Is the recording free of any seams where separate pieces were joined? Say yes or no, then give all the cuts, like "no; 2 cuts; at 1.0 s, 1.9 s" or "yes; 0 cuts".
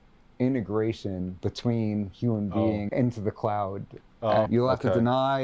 no; 3 cuts; at 1.3 s, 2.9 s, 4.5 s